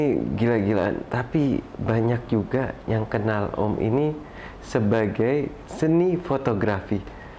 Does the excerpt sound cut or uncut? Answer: uncut